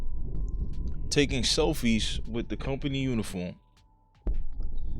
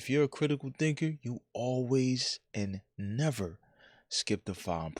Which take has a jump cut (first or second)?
first